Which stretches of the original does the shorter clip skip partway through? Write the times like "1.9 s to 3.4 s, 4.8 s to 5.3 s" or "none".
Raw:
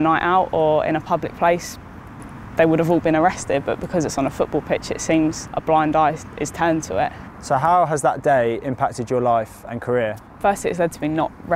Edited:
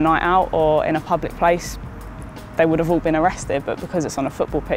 none